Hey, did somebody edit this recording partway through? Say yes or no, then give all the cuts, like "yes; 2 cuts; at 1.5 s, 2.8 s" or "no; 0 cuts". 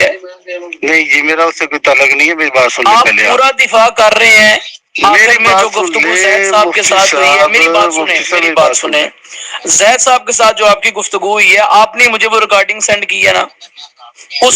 yes; 1 cut; at 2.3 s